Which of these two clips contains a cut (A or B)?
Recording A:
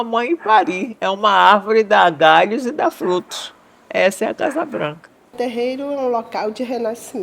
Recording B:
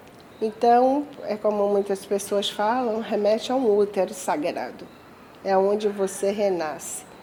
A